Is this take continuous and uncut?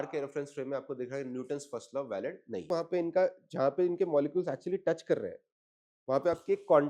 no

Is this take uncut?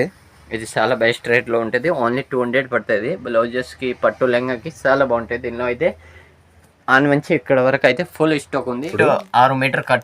no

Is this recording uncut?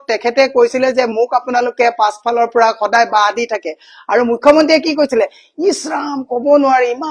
yes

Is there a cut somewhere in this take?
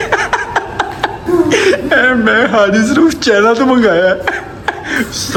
no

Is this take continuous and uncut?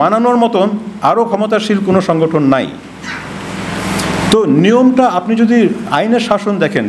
yes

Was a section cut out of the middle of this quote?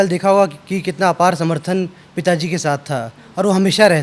no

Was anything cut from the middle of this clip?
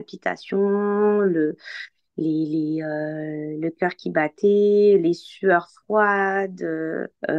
no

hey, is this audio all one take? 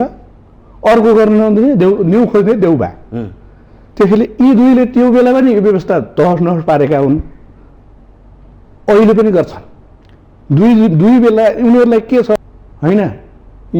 no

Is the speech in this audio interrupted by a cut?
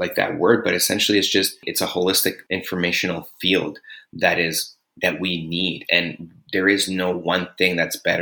yes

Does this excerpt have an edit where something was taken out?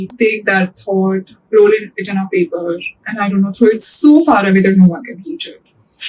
no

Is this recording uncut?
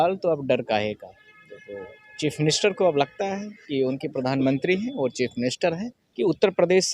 no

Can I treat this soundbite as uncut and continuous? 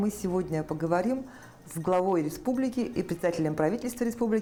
yes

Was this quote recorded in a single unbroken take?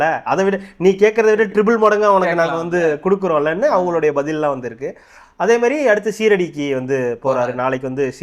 yes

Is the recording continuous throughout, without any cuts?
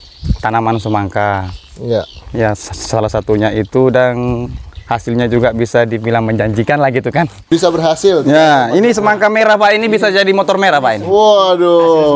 no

